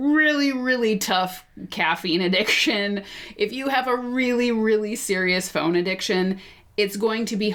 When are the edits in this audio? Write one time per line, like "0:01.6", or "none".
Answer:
none